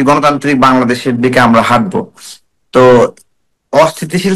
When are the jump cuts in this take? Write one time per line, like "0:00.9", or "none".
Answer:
none